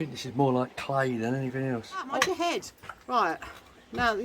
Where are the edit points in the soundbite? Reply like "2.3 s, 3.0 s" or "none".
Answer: 2.1 s